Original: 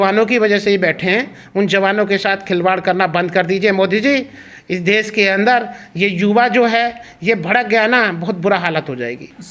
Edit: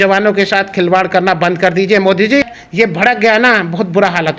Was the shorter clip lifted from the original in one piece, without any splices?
no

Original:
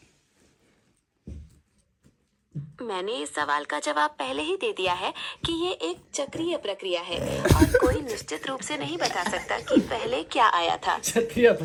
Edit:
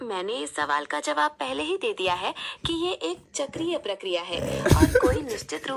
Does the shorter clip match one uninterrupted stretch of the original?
yes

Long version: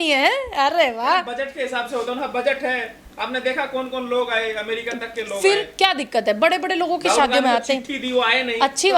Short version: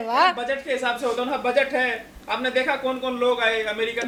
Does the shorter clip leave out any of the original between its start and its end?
no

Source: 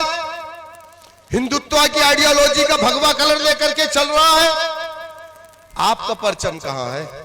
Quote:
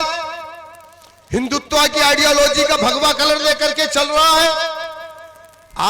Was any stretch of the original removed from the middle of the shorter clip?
no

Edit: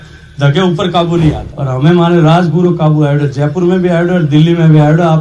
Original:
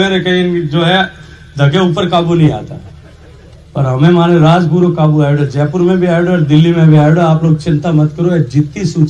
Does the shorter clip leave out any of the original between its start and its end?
yes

